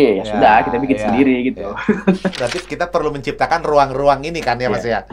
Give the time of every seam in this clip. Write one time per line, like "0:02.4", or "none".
0:02.4